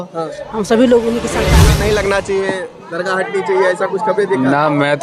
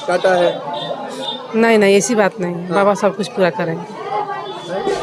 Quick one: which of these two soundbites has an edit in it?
first; 1 cut; at 1.5 s

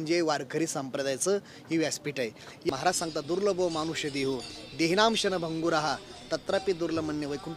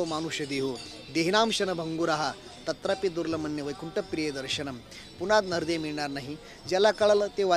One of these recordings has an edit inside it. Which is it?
first; 1 cut; at 2.7 s

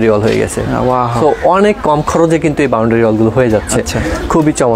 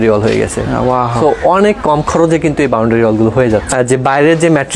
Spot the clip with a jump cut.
second; 1 cut; at 3.7 s

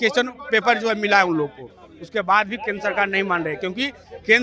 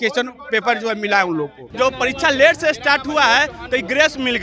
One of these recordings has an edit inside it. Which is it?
second; 1 cut; at 1.6 s

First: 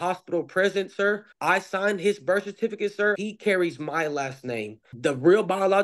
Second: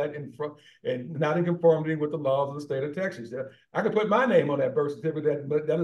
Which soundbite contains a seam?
first; 3 cuts; at 1.3 s, 3.2 s, 4.9 s

